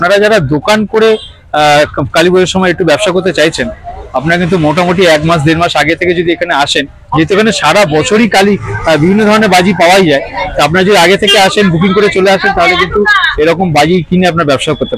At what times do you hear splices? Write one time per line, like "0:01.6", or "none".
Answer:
none